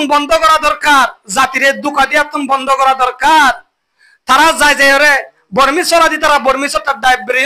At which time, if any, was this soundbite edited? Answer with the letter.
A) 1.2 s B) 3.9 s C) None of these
C